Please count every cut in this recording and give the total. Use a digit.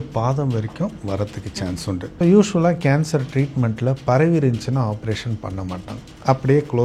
1